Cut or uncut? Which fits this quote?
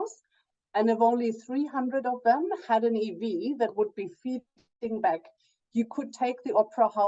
uncut